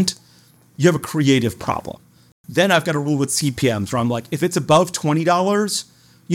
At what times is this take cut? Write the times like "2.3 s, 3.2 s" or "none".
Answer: 2.2 s